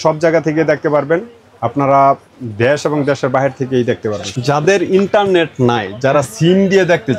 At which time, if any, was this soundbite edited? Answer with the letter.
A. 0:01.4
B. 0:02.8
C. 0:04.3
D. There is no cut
C